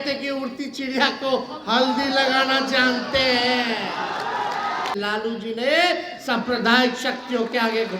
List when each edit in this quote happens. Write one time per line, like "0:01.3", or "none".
0:04.9